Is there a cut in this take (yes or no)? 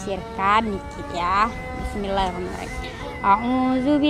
no